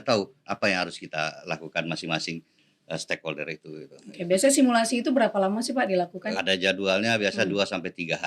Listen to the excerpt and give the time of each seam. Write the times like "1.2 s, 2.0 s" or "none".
6.2 s